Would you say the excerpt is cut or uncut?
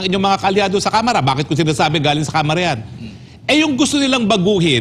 uncut